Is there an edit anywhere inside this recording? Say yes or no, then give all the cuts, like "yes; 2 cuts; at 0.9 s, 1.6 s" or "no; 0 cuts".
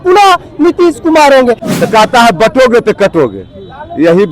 yes; 1 cut; at 1.6 s